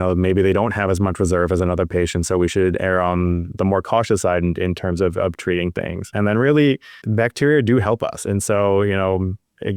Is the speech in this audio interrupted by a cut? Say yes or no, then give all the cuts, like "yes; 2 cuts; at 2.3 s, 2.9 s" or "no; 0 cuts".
yes; 2 cuts; at 3.6 s, 6.0 s